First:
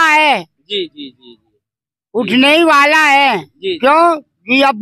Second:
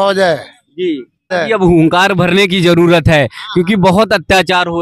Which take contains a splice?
second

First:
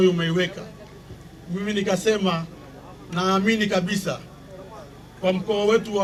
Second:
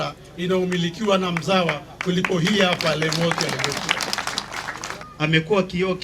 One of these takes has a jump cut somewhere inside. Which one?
second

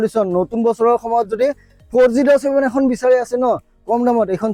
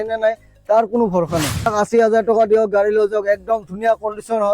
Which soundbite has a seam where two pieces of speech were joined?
second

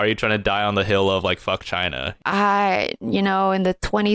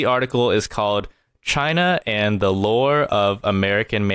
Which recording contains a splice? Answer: first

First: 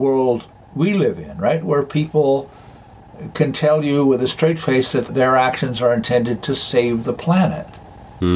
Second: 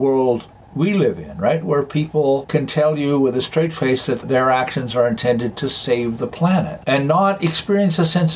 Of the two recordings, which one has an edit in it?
second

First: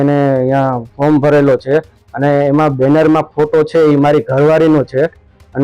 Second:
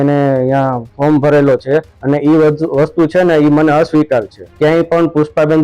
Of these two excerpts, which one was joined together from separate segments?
second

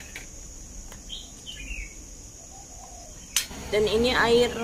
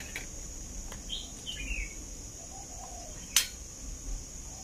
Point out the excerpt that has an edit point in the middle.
first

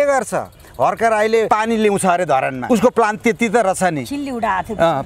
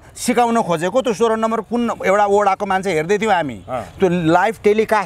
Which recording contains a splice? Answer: first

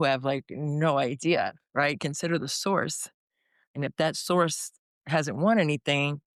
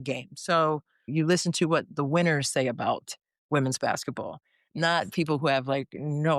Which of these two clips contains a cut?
second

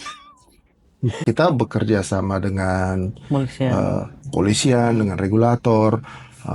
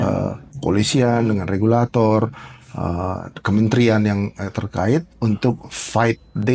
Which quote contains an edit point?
first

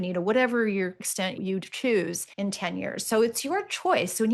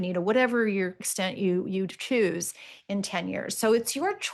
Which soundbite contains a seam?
first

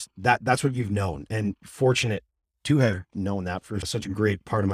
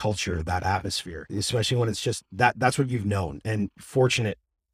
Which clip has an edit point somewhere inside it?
first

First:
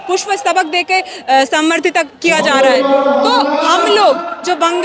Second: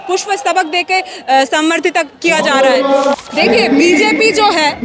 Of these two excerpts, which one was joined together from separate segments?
second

